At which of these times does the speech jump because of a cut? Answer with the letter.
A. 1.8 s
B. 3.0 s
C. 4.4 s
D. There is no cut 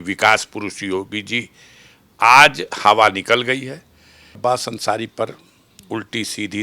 C